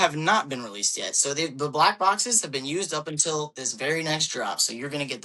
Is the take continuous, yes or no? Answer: yes